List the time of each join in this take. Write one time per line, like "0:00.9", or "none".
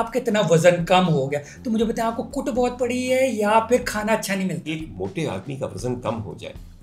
0:04.7